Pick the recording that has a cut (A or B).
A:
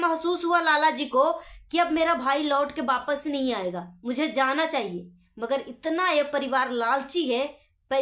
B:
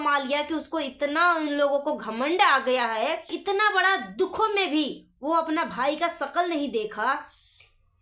B